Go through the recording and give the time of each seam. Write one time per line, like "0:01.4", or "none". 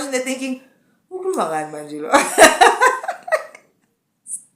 none